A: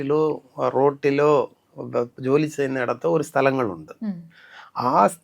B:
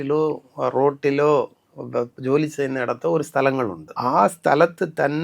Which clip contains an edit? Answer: B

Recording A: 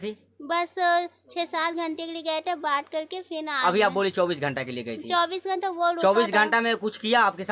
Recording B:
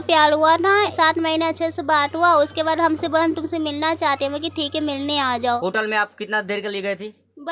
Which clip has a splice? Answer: B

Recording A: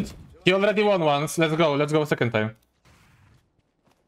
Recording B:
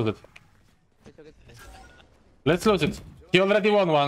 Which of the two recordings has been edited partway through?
A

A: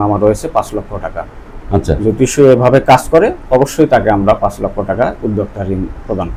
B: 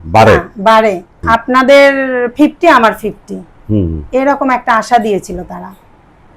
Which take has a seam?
B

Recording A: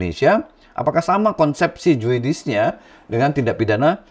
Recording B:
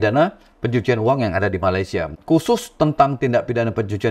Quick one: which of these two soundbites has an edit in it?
B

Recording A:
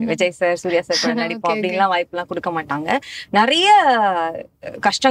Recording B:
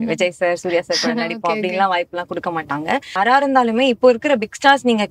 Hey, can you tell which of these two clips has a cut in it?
B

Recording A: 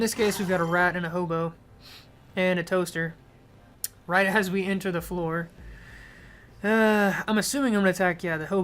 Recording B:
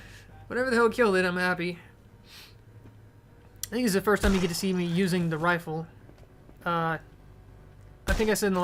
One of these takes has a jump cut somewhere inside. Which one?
A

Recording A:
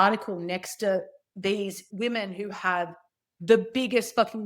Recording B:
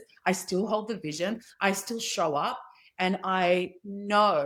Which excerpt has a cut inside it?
A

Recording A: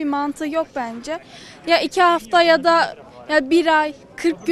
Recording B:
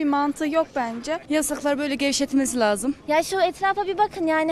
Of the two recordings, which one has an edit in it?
B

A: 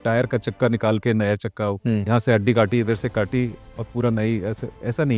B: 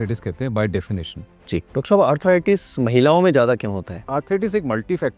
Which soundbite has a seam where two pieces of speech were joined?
B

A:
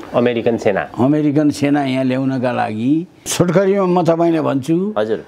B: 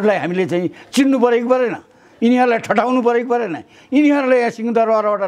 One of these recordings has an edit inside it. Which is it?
A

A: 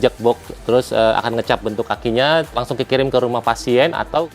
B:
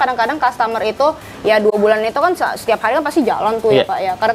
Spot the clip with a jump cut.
A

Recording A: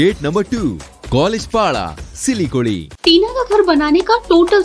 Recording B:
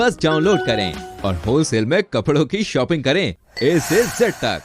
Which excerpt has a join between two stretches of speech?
A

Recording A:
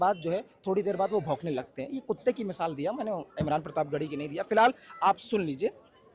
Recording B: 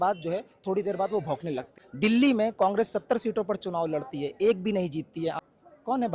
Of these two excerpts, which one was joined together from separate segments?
B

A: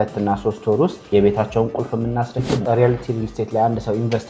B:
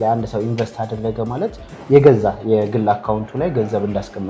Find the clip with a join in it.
A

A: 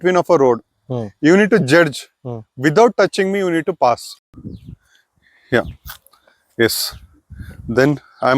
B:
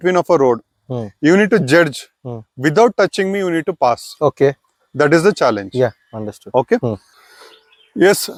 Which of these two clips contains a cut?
A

